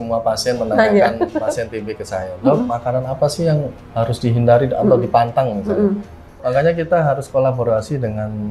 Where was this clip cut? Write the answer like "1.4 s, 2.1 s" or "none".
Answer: 6.4 s